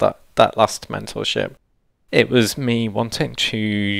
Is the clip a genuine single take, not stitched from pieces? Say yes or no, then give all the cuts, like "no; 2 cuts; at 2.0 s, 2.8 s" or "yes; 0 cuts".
yes; 0 cuts